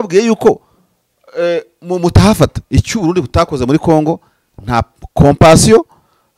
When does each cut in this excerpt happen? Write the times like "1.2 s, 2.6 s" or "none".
2.6 s